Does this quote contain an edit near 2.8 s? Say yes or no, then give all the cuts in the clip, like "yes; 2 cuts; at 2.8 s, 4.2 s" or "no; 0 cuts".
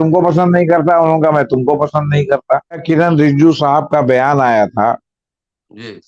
yes; 1 cut; at 2.8 s